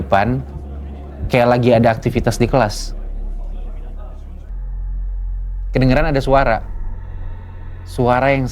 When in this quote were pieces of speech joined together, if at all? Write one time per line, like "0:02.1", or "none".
0:04.4